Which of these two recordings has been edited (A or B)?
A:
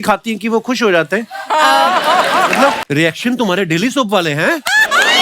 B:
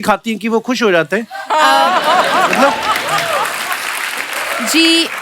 A